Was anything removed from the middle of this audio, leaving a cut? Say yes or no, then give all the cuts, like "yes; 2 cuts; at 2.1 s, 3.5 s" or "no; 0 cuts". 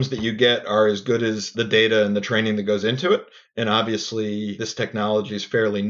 yes; 2 cuts; at 1.5 s, 4.6 s